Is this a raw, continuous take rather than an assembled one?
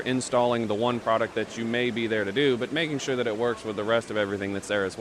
yes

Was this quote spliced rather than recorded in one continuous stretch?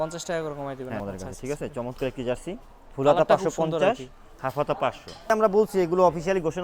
yes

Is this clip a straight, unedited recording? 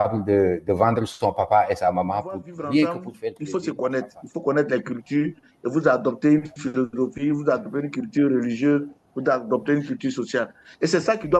no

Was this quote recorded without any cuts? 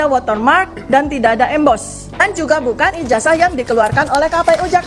no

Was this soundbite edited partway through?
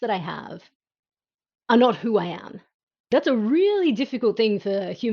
yes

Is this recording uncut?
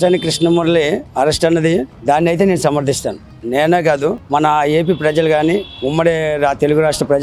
yes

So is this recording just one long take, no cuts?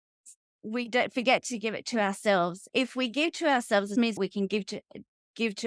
no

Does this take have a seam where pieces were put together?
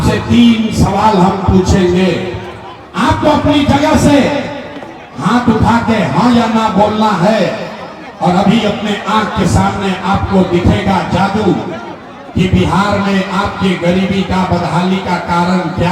no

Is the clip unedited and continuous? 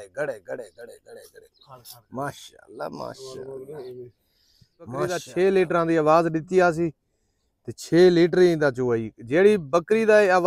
no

